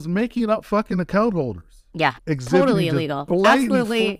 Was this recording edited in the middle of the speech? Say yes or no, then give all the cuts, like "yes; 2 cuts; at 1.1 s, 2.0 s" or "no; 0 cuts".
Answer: yes; 1 cut; at 2.2 s